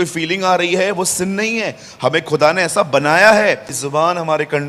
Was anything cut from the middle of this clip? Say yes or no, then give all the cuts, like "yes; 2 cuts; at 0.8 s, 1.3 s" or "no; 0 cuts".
yes; 1 cut; at 3.7 s